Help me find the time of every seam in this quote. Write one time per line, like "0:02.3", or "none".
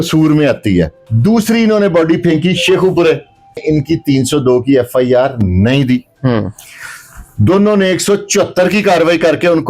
0:01.0
0:03.6

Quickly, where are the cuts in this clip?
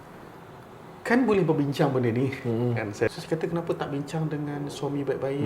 0:03.1

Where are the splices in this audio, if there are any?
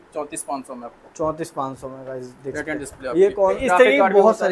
0:03.6

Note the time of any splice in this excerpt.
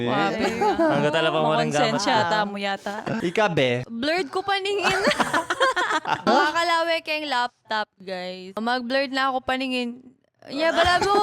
0:03.2
0:03.9
0:06.3
0:08.6

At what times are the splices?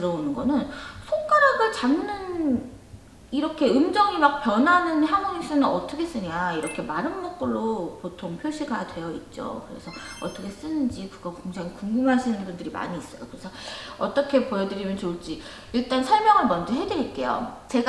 none

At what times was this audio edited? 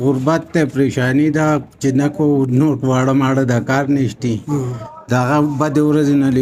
none

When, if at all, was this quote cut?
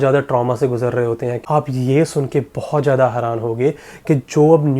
0:01.4

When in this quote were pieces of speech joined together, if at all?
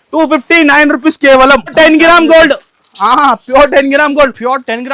0:01.7

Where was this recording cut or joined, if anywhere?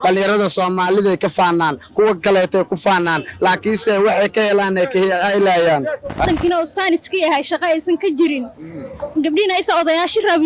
0:06.2

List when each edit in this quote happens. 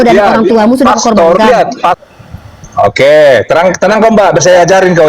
0:02.0

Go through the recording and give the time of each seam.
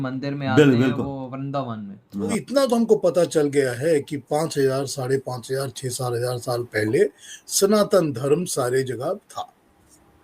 0:02.3

